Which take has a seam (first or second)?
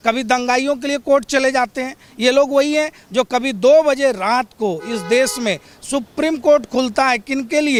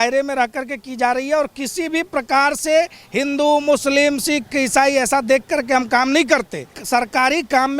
second